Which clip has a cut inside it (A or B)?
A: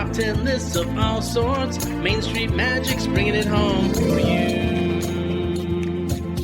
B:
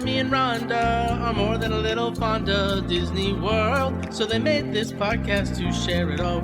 B